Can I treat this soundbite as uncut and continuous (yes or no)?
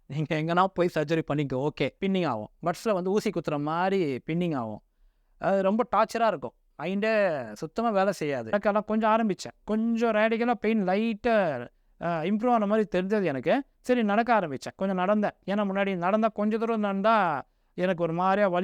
no